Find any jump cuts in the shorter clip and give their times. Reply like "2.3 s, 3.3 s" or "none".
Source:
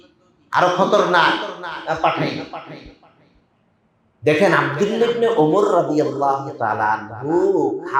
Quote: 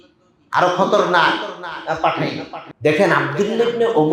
2.6 s

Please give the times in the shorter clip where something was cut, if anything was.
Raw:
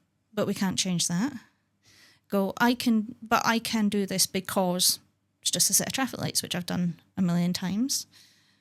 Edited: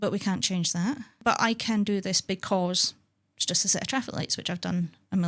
1.1 s

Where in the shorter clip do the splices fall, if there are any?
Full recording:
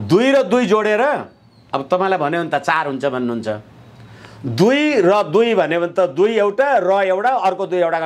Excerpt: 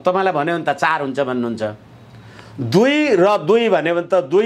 none

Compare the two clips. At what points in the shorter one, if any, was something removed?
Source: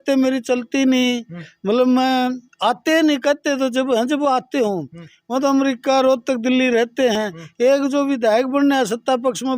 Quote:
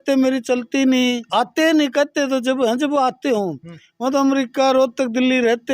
1.2 s

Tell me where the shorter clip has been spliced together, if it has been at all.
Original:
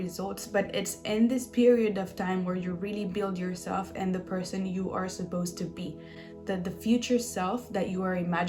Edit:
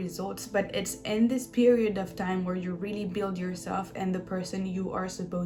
none

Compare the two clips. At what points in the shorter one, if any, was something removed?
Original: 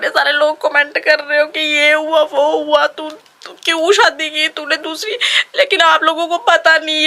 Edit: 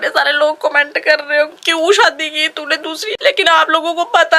1.6 s, 3.1 s

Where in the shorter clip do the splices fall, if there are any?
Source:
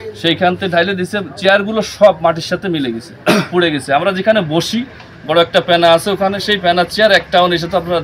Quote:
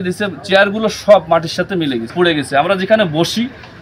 2.1 s

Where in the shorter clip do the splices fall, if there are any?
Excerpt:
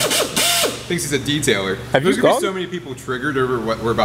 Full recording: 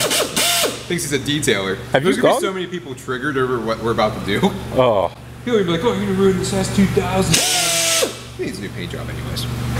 none

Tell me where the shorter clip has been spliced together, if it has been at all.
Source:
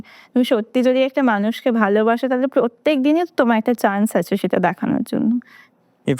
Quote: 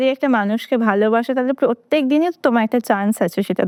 none

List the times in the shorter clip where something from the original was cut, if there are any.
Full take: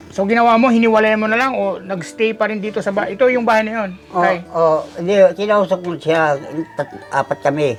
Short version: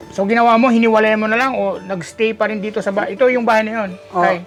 none

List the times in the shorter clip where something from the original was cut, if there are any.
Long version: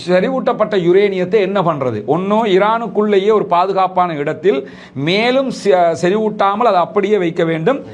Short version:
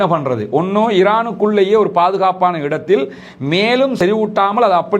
4.0 s

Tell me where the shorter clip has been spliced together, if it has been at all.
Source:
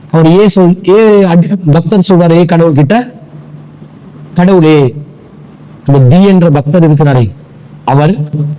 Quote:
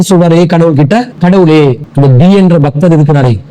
1.1 s, 1.9 s

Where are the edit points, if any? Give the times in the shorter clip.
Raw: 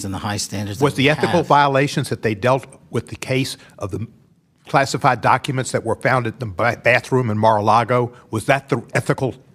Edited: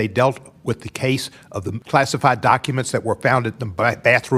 1.8 s

